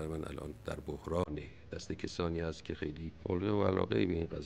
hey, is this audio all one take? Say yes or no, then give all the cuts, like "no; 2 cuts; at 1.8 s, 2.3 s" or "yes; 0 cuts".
no; 1 cut; at 3.2 s